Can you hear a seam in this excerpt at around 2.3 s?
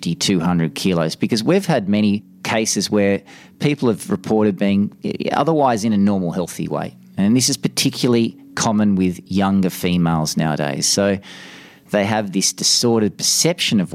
yes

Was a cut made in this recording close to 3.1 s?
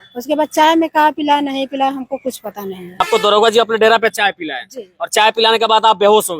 yes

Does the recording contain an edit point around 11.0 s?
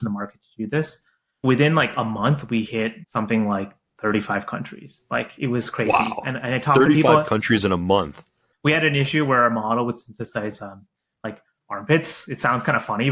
no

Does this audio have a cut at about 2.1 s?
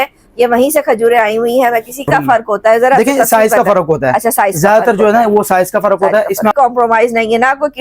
yes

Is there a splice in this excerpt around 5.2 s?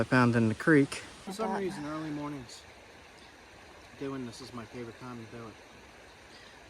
no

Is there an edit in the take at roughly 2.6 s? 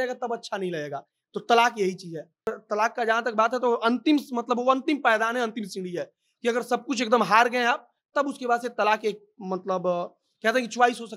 yes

